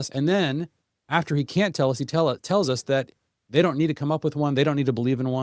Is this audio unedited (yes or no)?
yes